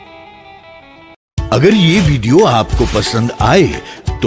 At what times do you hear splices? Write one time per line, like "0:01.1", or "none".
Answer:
0:01.1